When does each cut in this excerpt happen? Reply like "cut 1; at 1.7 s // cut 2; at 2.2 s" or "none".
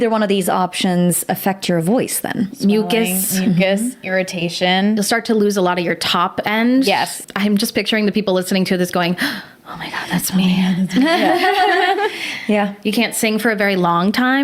cut 1; at 7.2 s